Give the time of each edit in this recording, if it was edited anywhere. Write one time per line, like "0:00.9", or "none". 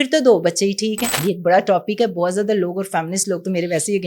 0:01.1